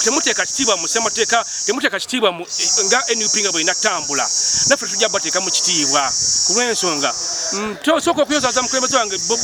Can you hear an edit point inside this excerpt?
no; 0 cuts

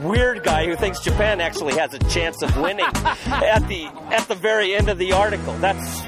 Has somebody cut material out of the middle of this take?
no; 0 cuts

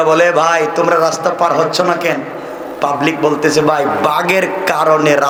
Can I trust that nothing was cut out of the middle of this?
yes; 0 cuts

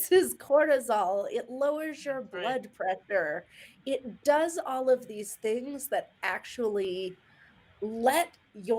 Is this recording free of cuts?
yes; 0 cuts

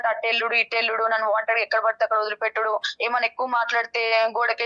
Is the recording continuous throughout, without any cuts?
yes; 0 cuts

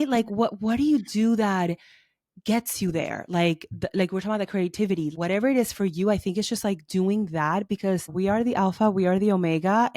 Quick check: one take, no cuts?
no; 2 cuts; at 5.1 s, 8.1 s

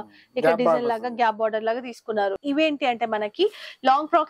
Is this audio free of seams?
no; 1 cut; at 2.4 s

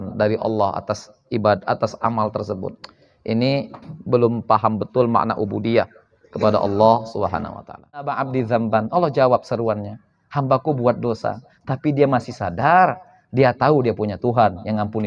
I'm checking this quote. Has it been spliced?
yes; 1 cut; at 8.1 s

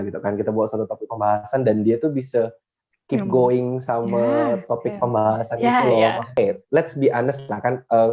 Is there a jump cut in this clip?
yes; 1 cut; at 6.4 s

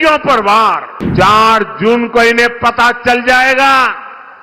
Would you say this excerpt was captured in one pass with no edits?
no; 1 cut; at 0.9 s

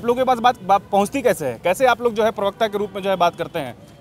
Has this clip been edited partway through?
no; 0 cuts

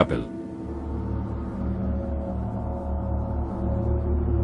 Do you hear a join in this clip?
yes; 1 cut; at 2.6 s

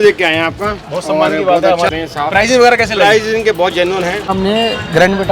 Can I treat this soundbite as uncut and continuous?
no; 2 cuts; at 1.9 s, 4.3 s

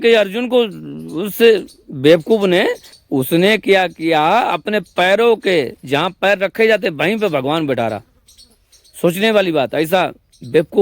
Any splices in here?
yes; 1 cut; at 2.9 s

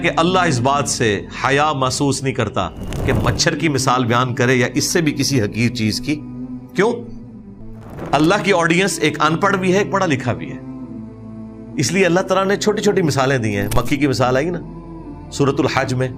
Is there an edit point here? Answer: no; 0 cuts

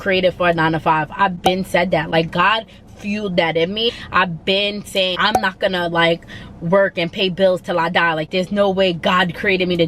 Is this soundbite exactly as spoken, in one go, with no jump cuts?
no; 2 cuts; at 3.9 s, 5.1 s

